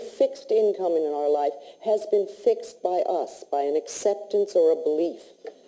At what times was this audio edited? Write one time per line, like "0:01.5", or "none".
0:02.7